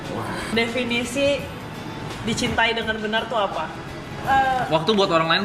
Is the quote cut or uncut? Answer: cut